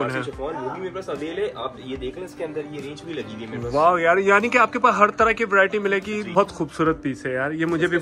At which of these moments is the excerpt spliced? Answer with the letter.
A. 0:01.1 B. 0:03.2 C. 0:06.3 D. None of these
C